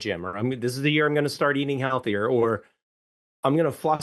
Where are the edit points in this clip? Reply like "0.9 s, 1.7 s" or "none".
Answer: none

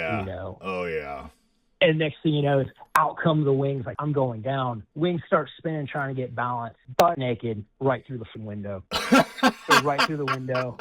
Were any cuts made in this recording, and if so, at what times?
4.0 s, 7.2 s, 8.3 s

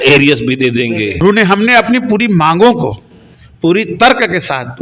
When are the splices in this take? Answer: 1.2 s

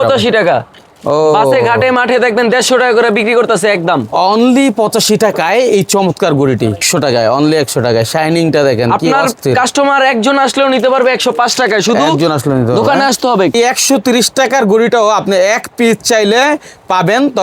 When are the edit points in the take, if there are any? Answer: 6.8 s, 13.5 s

